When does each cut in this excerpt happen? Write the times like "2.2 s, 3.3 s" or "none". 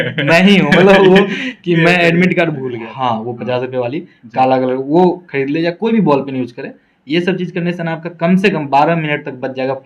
2.8 s

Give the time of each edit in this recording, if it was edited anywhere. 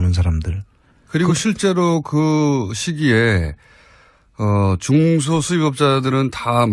5.0 s

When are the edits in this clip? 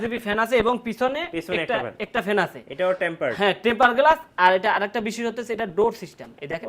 none

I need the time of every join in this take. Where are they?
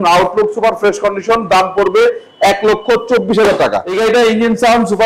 3.9 s

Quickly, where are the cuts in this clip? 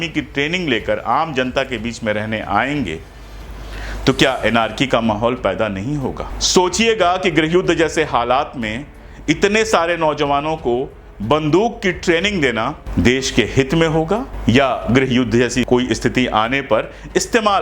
6.3 s, 12.8 s, 14.3 s, 15.7 s

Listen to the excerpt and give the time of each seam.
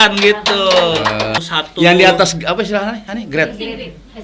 1.4 s

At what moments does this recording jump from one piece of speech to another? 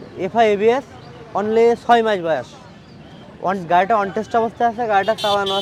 none

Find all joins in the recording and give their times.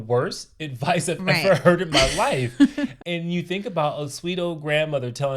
3.0 s

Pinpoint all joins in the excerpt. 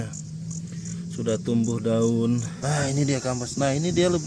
2.5 s

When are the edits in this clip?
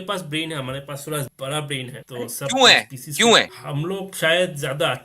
1.3 s, 2.0 s, 3.6 s

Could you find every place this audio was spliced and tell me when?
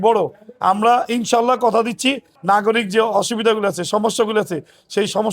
2.3 s

